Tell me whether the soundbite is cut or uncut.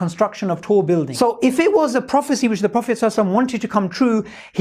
cut